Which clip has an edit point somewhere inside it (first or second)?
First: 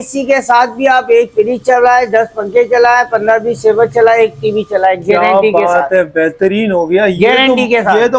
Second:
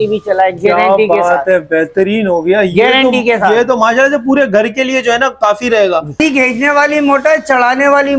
second